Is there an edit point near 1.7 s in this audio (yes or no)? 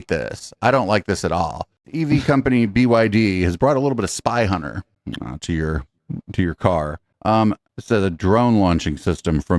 yes